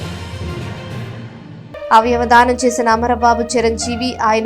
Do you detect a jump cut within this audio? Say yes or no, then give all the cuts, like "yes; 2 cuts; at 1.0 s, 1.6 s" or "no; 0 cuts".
yes; 1 cut; at 1.2 s